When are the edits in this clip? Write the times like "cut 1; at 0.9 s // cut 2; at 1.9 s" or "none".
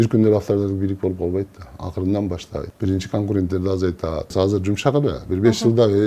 cut 1; at 2.7 s // cut 2; at 4.3 s